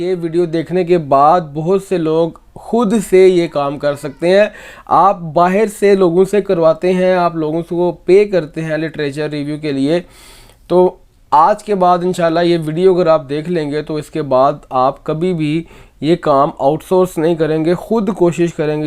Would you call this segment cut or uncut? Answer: uncut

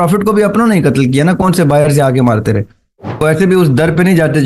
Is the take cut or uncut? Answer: cut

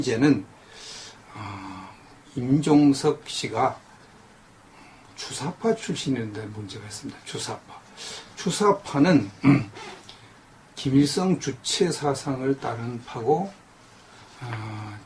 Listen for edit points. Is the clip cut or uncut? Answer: uncut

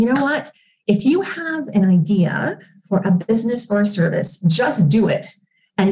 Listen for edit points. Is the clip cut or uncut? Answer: uncut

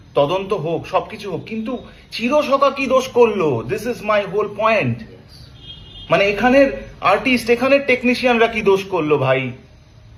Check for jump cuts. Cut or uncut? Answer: uncut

